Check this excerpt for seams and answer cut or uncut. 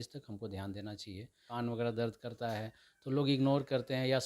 cut